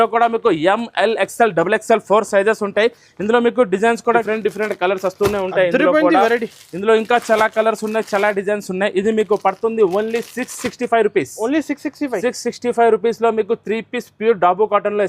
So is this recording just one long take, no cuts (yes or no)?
no